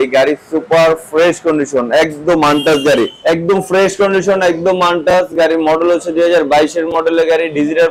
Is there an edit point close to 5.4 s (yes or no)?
no